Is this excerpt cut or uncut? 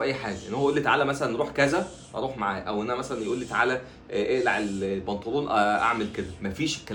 uncut